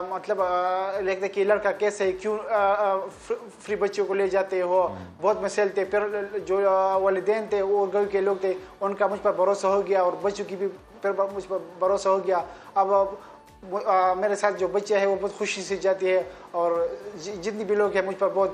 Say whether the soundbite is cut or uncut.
uncut